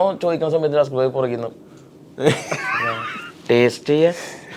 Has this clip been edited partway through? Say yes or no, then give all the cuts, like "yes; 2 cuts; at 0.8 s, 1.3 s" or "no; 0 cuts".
no; 0 cuts